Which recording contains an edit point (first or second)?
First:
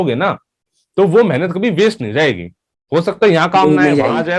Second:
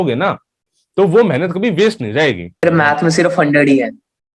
second